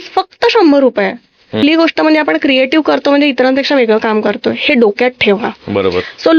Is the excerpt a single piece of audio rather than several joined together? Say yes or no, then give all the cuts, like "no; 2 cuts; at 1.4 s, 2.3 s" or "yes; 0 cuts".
no; 1 cut; at 1.6 s